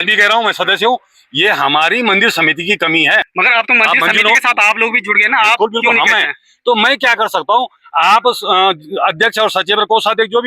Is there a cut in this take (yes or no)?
yes